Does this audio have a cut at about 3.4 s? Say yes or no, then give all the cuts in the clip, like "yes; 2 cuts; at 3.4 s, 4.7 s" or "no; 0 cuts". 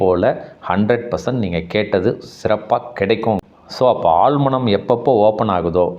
yes; 1 cut; at 3.4 s